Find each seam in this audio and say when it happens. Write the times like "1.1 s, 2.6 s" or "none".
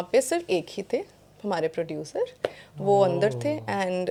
none